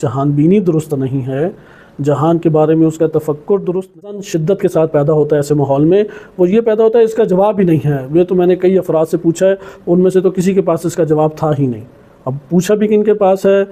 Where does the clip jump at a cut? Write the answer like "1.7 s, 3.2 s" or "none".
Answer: 4.2 s

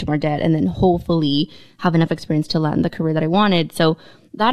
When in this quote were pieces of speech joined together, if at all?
none

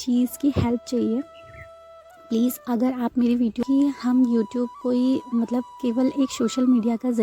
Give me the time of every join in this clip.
3.6 s

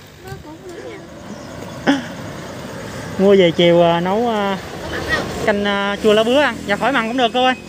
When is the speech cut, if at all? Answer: 1.0 s

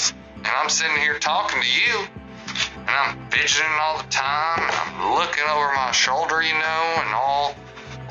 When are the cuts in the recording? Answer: none

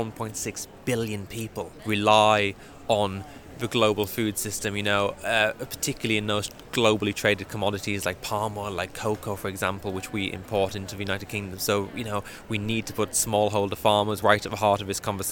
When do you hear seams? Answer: 1.8 s, 14.2 s

